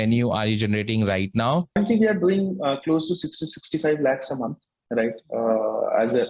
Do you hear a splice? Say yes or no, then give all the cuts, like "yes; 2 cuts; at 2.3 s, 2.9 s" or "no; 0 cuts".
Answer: yes; 1 cut; at 1.7 s